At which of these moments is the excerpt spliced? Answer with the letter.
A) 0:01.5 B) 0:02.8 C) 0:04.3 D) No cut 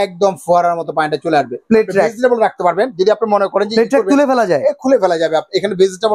A